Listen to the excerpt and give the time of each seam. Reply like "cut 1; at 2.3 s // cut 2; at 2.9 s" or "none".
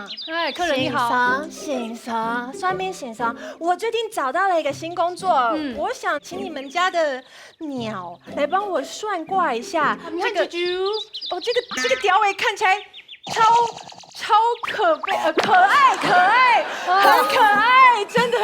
cut 1; at 10.1 s